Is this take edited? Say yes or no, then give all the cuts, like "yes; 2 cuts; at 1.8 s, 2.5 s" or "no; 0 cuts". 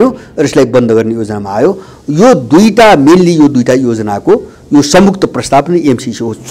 no; 0 cuts